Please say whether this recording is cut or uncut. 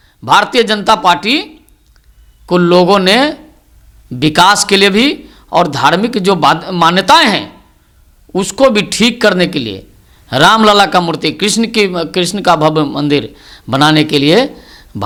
uncut